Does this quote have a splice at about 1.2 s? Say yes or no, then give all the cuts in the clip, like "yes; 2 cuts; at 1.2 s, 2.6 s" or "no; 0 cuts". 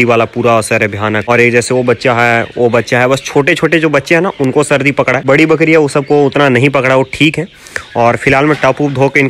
no; 0 cuts